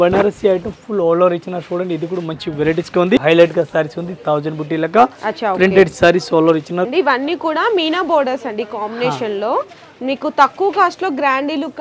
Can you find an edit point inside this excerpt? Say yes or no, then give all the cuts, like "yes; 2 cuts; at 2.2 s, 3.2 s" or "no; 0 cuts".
yes; 2 cuts; at 3.2 s, 6.9 s